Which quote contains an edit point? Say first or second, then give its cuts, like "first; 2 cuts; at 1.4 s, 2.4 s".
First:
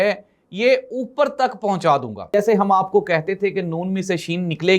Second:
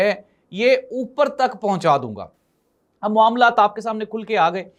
first; 1 cut; at 2.3 s